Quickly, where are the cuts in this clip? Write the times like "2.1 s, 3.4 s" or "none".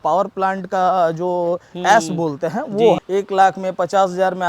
3.0 s